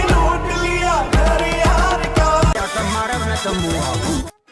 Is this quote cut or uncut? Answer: cut